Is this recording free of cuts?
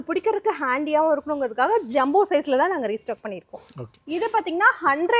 no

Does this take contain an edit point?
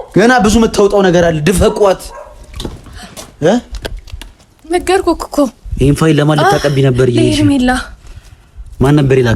no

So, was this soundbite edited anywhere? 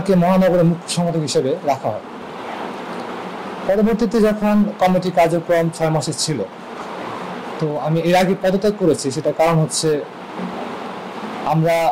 no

